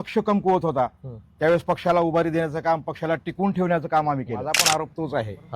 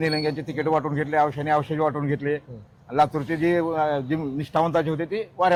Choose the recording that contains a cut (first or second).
first